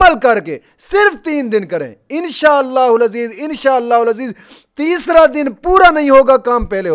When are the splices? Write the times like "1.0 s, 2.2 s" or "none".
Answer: none